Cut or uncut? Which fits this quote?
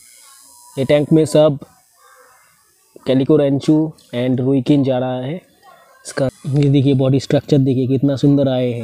cut